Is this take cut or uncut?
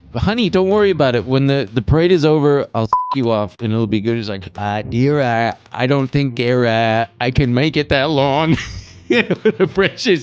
uncut